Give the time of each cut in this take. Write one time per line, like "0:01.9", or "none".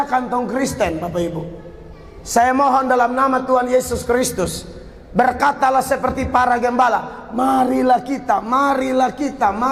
none